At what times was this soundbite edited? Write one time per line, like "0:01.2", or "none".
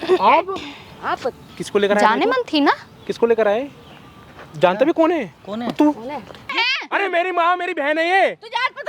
0:01.5
0:06.6